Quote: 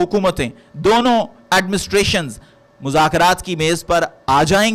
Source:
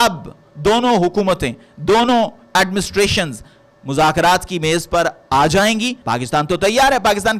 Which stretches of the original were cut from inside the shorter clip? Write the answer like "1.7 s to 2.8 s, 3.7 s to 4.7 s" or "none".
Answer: none